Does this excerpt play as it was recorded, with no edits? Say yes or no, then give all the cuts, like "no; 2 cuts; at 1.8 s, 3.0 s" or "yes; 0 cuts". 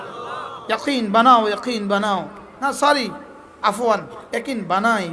no; 1 cut; at 2.4 s